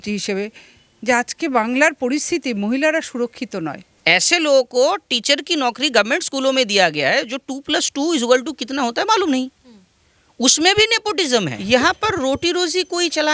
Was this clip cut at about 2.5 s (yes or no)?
no